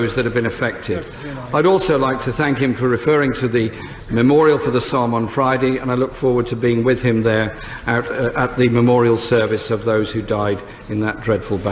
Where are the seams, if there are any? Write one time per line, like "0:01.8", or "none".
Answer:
0:05.8